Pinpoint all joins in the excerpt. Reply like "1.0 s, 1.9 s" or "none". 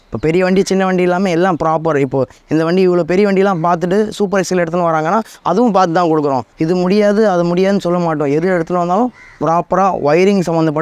none